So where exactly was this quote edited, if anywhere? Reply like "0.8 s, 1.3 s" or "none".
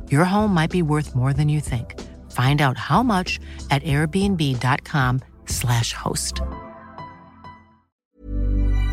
8.0 s